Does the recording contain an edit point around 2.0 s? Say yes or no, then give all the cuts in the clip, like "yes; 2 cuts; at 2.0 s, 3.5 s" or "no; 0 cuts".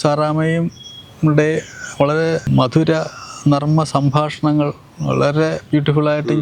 no; 0 cuts